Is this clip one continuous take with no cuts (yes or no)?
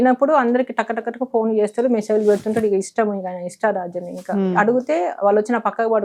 yes